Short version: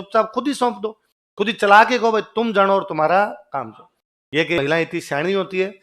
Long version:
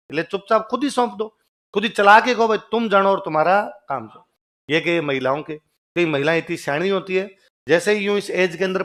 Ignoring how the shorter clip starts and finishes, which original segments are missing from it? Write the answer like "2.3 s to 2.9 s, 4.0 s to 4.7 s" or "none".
4.9 s to 6.1 s